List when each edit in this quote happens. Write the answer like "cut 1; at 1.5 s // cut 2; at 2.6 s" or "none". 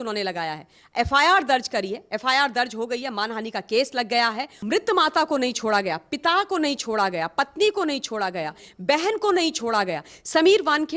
cut 1; at 4.5 s